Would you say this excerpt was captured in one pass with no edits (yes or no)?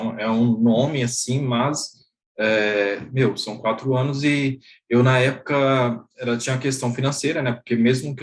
yes